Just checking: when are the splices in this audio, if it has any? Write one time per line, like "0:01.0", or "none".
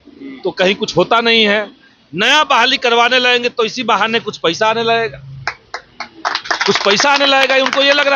none